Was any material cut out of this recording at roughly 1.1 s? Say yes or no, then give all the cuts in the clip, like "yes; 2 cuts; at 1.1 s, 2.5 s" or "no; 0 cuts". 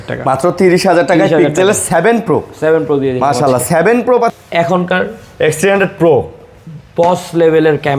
no; 1 cut; at 4.3 s